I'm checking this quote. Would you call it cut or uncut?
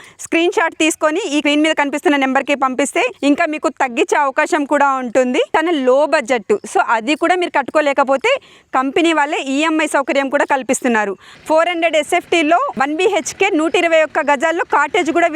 cut